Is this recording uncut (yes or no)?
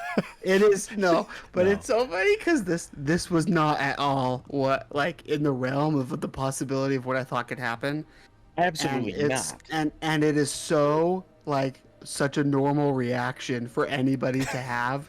no